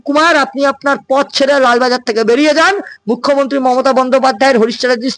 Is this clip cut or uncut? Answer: uncut